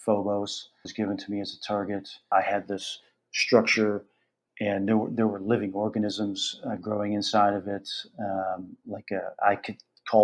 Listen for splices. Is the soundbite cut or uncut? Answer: cut